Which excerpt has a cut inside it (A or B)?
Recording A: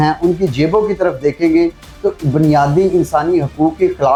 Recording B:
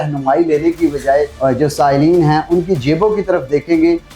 B